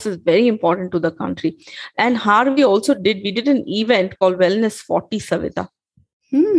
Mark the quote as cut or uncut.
uncut